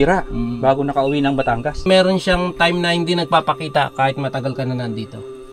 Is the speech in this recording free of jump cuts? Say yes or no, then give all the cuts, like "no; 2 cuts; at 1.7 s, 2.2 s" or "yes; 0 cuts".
no; 1 cut; at 1.8 s